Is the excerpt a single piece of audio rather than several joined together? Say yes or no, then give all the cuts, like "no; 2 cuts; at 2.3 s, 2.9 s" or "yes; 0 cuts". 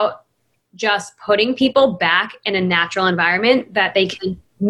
yes; 0 cuts